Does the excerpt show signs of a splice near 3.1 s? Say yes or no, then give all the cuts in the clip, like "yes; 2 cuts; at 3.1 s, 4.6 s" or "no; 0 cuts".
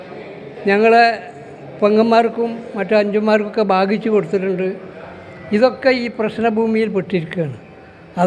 no; 0 cuts